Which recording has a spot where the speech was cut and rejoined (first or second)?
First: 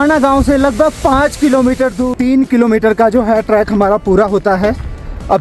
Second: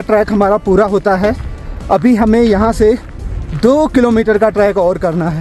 first